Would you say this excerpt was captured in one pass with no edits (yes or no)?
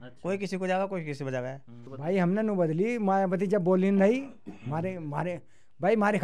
no